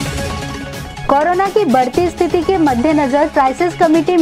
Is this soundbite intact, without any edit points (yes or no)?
no